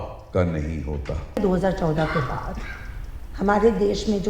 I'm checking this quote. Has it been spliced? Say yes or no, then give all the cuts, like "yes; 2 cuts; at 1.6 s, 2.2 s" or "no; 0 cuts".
yes; 1 cut; at 1.4 s